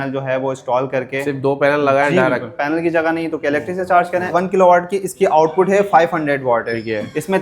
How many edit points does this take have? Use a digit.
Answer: 2